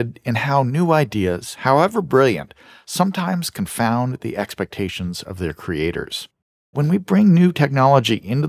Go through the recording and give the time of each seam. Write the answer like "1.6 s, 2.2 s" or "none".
6.7 s